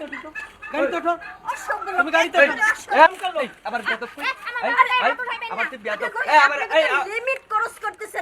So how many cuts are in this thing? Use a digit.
1